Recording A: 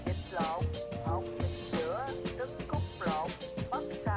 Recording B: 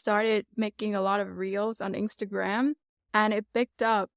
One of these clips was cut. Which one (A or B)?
B